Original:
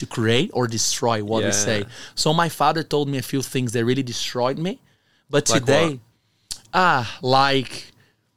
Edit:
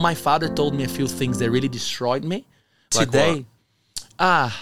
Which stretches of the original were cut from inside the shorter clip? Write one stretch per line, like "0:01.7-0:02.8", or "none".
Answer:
0:05.3-0:05.5